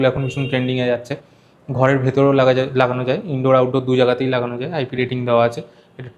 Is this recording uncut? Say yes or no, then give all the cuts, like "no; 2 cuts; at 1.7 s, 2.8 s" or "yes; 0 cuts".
yes; 0 cuts